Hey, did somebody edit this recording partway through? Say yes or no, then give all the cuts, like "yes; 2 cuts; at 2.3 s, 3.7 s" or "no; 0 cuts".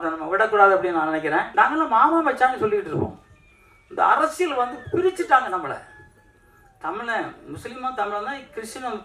yes; 1 cut; at 1.5 s